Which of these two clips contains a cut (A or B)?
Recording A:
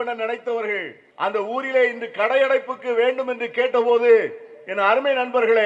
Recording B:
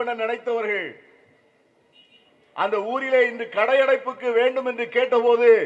A